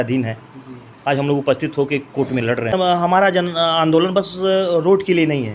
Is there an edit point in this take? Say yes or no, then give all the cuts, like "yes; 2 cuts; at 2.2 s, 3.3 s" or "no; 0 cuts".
yes; 1 cut; at 2.7 s